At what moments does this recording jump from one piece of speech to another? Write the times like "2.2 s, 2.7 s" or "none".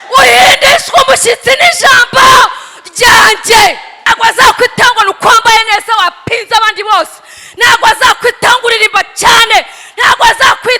3.9 s